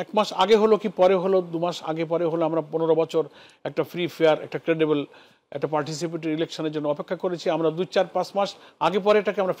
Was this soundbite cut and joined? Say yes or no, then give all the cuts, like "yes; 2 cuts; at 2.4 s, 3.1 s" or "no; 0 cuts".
no; 0 cuts